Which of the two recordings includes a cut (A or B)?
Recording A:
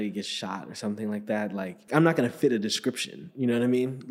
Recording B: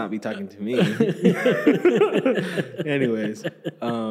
A